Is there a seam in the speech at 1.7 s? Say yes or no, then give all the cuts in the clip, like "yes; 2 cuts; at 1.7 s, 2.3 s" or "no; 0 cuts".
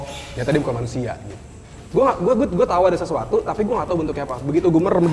yes; 1 cut; at 1.7 s